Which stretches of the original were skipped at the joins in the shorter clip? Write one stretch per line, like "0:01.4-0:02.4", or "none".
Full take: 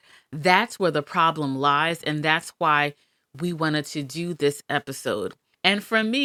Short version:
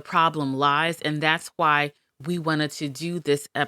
0:03.1-0:03.2